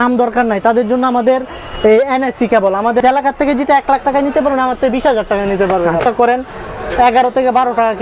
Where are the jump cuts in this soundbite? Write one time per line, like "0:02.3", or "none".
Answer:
0:03.0
0:06.0